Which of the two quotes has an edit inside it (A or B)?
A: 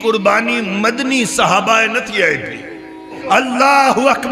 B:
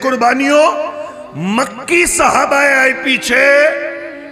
A